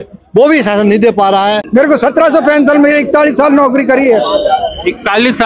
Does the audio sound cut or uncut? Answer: cut